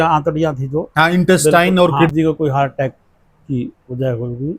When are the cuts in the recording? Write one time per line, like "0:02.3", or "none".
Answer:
0:02.1